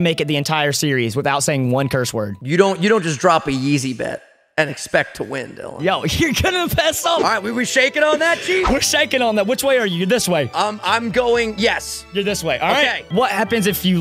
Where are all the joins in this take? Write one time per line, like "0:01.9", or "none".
0:02.3
0:07.2
0:10.5
0:13.1